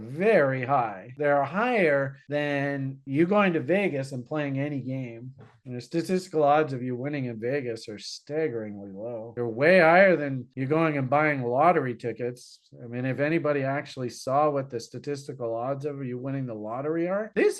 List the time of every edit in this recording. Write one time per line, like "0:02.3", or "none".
0:01.0